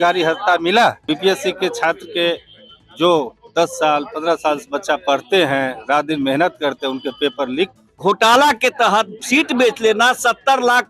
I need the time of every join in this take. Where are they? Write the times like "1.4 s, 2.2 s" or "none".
1.0 s, 7.8 s